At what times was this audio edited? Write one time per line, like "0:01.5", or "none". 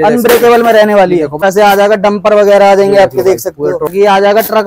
0:01.3
0:03.9